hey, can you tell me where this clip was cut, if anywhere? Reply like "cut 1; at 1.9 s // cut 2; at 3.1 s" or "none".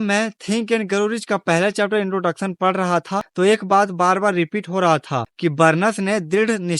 cut 1; at 3.3 s // cut 2; at 5.2 s